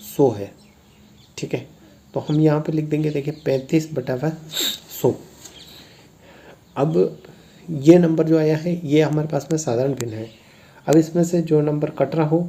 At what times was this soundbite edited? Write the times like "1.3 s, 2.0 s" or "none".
none